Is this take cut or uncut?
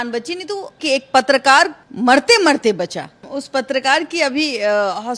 cut